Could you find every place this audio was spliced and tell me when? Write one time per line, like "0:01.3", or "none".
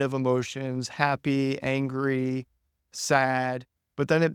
none